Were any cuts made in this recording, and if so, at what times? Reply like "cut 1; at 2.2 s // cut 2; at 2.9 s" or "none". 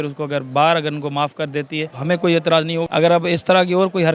cut 1; at 1.9 s // cut 2; at 2.9 s